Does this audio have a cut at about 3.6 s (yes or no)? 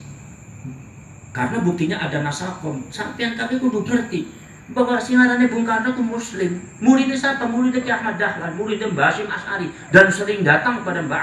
no